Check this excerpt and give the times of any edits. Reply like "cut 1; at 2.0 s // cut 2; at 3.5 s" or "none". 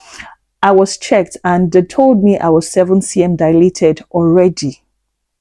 none